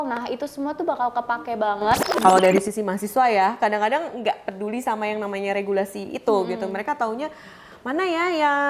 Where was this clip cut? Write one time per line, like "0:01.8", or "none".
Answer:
0:02.2